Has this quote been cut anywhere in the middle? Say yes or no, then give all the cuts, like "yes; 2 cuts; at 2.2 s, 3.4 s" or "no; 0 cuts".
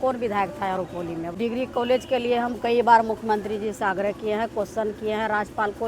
yes; 1 cut; at 1.3 s